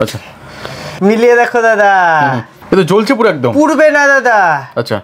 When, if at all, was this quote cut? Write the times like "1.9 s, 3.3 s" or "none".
0.9 s, 2.5 s